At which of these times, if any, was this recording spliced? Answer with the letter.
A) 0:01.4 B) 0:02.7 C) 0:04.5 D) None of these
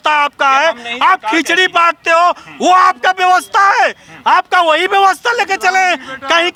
D